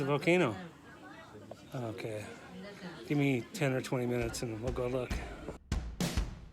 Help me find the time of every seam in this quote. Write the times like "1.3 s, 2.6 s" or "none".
5.6 s